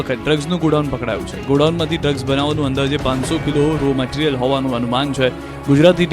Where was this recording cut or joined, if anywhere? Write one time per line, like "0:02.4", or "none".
0:03.4